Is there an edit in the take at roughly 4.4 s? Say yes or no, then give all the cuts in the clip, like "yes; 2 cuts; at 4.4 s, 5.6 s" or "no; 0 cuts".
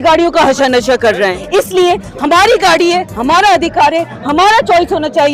no; 1 cut; at 1.4 s